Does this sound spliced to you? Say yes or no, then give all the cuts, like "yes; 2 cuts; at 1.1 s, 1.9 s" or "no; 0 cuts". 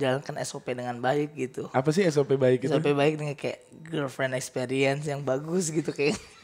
no; 0 cuts